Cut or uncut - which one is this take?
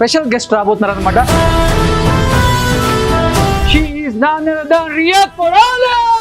cut